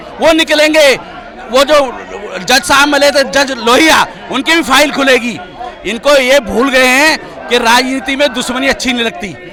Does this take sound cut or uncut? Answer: uncut